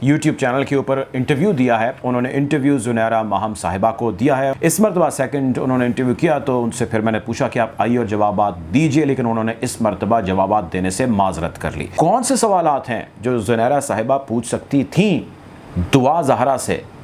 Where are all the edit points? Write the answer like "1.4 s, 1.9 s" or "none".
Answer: 2.0 s, 4.5 s, 11.9 s